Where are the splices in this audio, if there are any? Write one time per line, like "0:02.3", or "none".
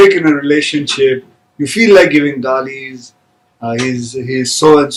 none